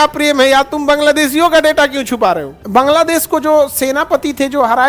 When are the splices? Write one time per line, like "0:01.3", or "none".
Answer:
0:02.6

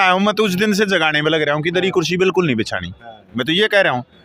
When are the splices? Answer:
none

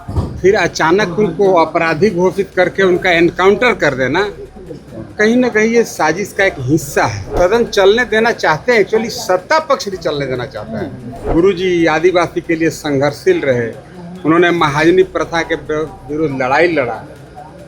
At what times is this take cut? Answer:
0:07.3
0:11.3

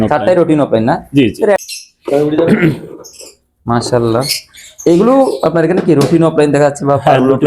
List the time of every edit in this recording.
0:01.6

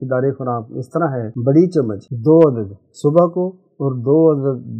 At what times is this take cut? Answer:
0:01.3
0:02.0

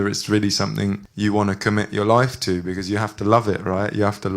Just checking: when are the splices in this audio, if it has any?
0:01.1

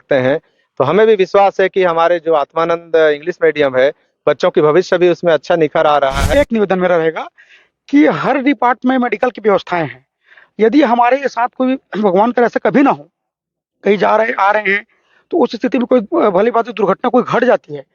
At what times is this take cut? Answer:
0:06.3

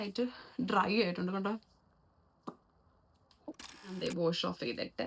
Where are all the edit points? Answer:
0:03.9

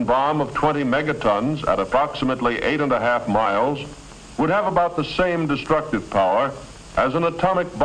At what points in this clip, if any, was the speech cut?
0:03.2

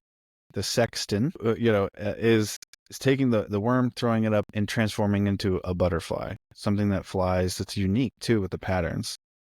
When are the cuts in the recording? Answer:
0:01.4

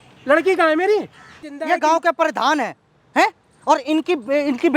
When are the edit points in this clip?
0:01.5

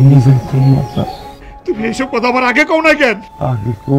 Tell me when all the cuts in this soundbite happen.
none

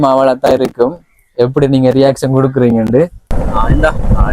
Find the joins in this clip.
0:03.4

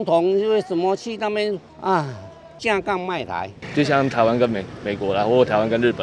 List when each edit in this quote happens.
0:03.6

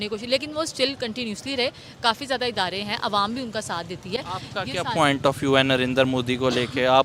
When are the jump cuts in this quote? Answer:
none

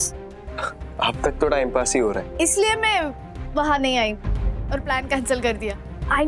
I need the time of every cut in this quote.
0:02.3

